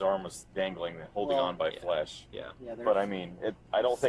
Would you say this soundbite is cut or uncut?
uncut